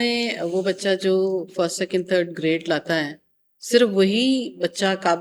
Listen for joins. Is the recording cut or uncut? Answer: uncut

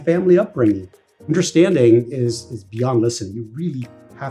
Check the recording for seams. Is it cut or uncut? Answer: cut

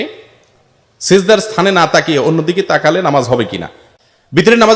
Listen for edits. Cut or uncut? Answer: cut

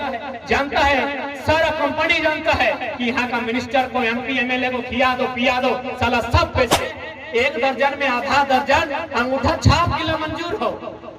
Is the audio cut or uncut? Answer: cut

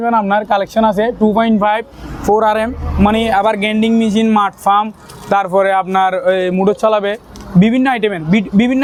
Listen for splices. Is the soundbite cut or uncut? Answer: uncut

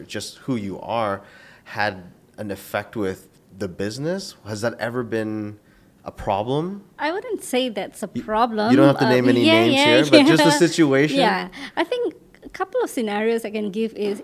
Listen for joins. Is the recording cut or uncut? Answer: cut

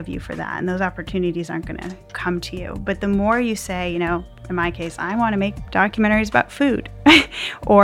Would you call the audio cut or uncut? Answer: cut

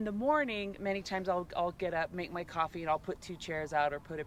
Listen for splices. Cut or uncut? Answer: uncut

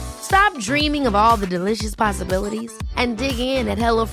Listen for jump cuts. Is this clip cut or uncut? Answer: uncut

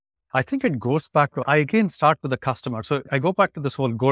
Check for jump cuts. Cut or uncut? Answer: cut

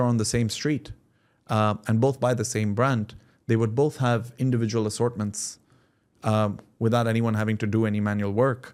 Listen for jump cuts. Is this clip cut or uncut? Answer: uncut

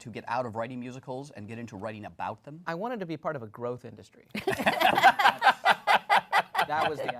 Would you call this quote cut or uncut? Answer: uncut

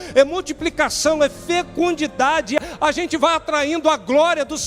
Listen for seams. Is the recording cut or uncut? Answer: cut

